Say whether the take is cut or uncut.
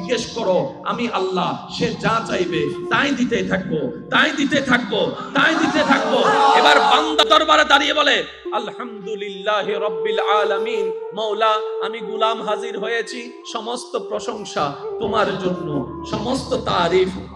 cut